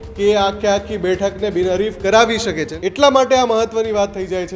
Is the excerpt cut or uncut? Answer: cut